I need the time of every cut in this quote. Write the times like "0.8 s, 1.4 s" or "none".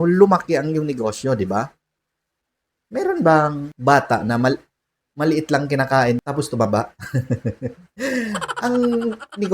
3.7 s, 6.2 s